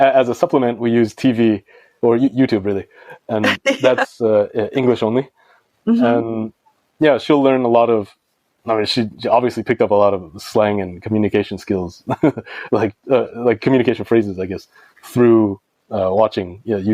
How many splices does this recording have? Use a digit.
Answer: 0